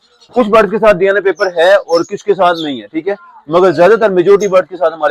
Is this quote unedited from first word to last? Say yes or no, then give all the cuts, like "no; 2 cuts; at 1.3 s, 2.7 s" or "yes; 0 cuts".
yes; 0 cuts